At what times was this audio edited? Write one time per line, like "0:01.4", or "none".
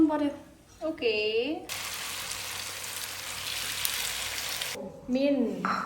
0:01.7
0:04.9